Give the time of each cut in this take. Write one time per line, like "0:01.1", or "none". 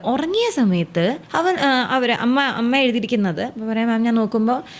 0:01.2